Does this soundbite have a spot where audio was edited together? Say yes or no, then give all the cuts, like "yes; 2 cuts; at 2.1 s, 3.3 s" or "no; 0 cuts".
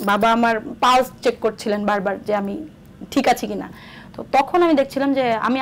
no; 0 cuts